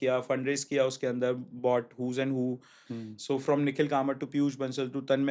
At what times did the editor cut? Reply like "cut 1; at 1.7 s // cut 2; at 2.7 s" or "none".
cut 1; at 2.9 s